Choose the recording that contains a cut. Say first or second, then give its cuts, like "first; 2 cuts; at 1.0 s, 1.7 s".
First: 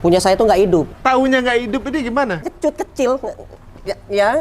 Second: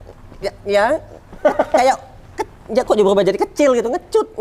first; 2 cuts; at 0.9 s, 2.5 s